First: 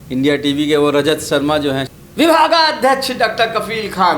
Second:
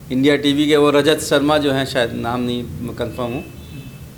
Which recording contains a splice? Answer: first; 1 cut; at 1.9 s

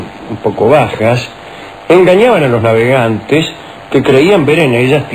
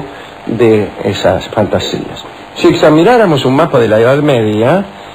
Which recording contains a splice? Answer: first; 1 cut; at 3.1 s

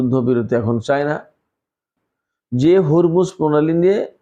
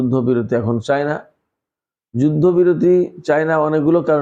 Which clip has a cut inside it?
first; 1 cut; at 2.0 s

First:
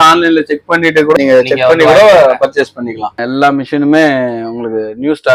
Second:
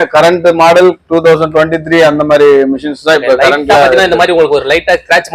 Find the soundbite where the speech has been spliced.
first; 2 cuts; at 1.1 s, 3.2 s

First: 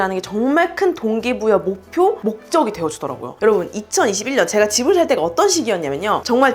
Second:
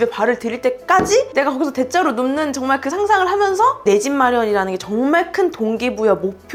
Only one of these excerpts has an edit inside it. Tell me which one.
first; 1 cut; at 3.3 s

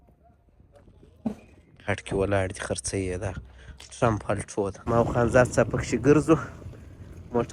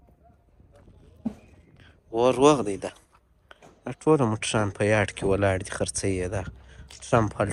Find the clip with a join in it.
first; 2 cuts; at 2.0 s, 4.8 s

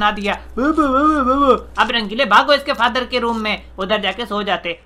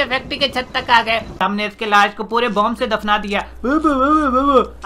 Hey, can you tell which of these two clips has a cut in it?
second; 1 cut; at 1.4 s

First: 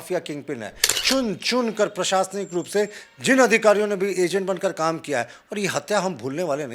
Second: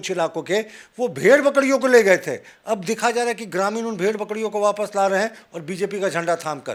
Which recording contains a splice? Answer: first; 1 cut; at 1.0 s

